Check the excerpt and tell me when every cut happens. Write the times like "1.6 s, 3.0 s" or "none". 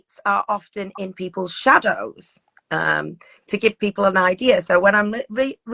none